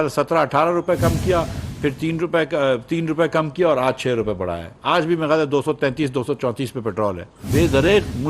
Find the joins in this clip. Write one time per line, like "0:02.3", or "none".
0:07.3